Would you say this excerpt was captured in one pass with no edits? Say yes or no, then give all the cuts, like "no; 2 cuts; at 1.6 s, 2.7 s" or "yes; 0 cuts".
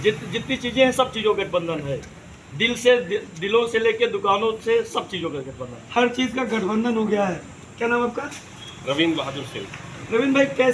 yes; 0 cuts